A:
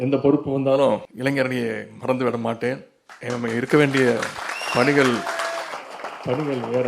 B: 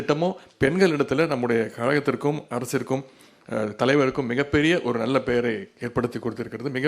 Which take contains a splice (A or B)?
A